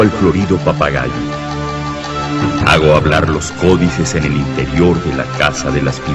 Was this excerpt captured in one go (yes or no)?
no